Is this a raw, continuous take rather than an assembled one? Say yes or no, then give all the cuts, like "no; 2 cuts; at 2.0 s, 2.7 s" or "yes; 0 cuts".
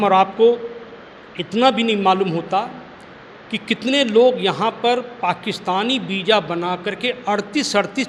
yes; 0 cuts